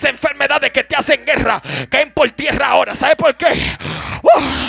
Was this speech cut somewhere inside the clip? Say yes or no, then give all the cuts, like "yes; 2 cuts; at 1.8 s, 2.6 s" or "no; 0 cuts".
no; 0 cuts